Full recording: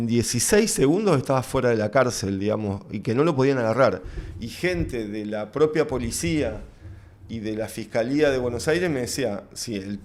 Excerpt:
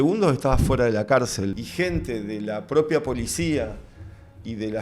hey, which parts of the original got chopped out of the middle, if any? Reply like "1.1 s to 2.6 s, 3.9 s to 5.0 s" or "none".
2.4 s to 4.4 s